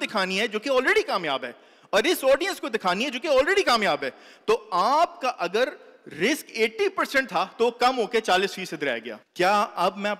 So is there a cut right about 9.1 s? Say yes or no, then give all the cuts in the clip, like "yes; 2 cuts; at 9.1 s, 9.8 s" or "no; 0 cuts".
yes; 1 cut; at 9.1 s